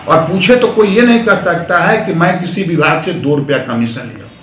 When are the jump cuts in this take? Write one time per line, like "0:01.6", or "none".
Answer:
none